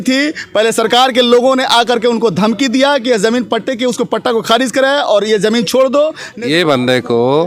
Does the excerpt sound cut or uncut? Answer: cut